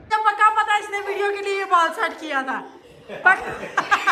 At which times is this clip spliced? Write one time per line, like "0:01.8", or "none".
0:03.1